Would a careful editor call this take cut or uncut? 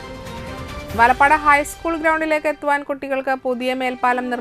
uncut